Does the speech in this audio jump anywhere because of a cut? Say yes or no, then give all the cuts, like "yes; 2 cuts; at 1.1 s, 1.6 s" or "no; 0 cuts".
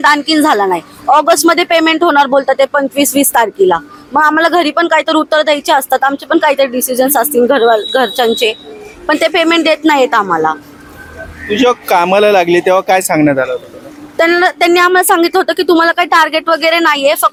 no; 0 cuts